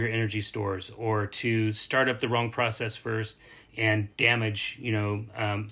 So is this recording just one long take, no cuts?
yes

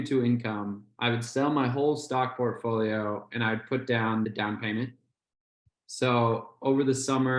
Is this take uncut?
no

